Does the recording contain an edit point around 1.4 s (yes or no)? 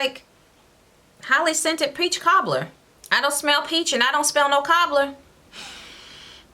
no